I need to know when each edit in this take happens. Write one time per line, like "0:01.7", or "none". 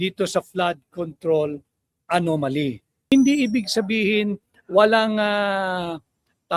0:03.1